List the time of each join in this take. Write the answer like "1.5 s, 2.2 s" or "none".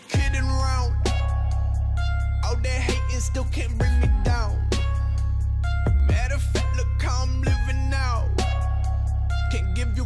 none